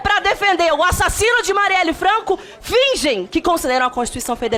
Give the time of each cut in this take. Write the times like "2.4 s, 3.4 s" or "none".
none